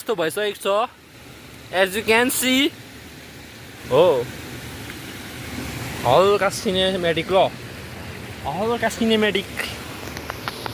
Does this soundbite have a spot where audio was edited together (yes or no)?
no